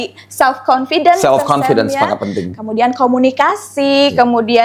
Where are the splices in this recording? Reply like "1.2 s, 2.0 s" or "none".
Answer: none